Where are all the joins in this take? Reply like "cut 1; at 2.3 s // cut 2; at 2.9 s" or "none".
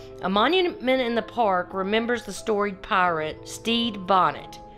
cut 1; at 3.5 s